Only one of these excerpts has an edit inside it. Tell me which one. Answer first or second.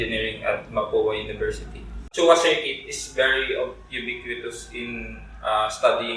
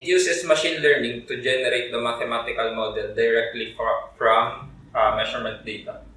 first